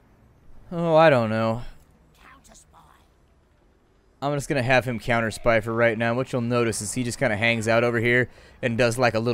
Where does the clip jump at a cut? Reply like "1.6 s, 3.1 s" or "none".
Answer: 4.1 s

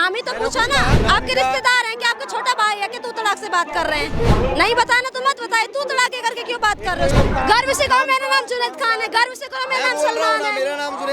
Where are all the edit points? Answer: 1.0 s, 4.3 s, 7.1 s

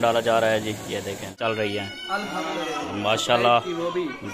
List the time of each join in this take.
1.4 s

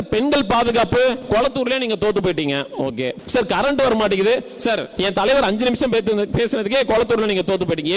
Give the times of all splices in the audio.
1.2 s, 3.2 s, 4.9 s

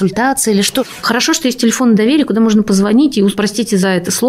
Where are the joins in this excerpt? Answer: 0.9 s

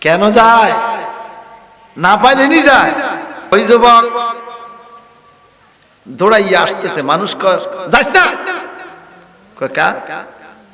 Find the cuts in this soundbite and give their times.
3.5 s

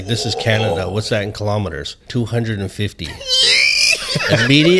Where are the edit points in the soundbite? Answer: 2.0 s

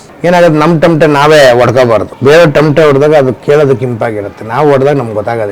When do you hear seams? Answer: 2.1 s

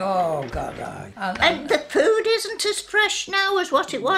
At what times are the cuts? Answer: 2.3 s

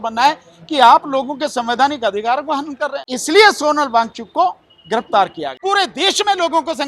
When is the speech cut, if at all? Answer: 3.1 s, 5.5 s

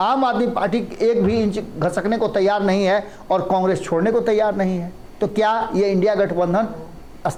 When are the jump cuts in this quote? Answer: none

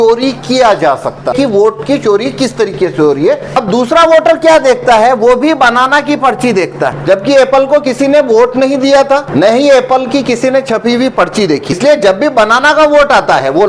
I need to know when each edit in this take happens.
1.3 s, 3.6 s, 7.0 s, 9.3 s, 11.8 s

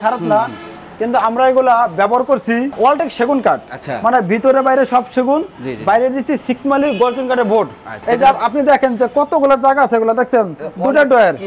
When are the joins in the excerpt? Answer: none

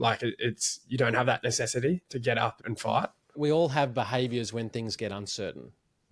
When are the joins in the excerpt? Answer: 3.3 s

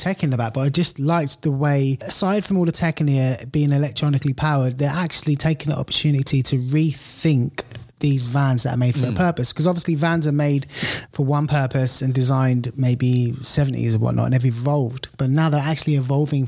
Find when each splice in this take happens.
2.1 s

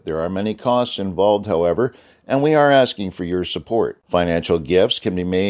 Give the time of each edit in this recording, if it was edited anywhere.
none

